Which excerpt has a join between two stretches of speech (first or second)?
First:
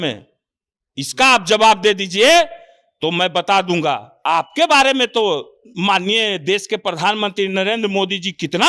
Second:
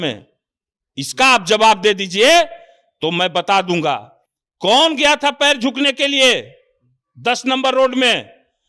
first